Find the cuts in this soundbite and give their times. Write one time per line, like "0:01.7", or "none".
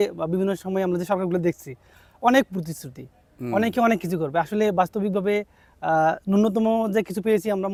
none